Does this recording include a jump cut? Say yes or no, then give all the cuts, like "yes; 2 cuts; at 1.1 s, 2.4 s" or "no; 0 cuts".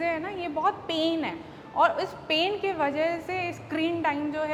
no; 0 cuts